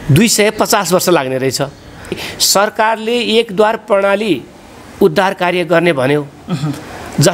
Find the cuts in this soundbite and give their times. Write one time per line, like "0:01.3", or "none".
0:02.3